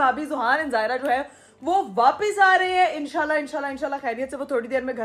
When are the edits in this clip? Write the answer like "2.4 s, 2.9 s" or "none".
none